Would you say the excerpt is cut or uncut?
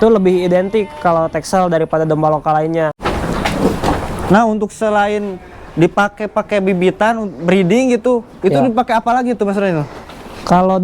cut